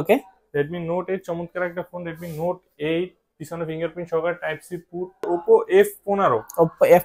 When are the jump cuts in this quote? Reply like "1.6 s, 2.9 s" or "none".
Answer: 5.3 s